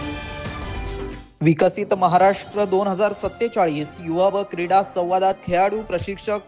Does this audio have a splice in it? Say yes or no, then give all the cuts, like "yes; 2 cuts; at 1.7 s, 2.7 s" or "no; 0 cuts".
no; 0 cuts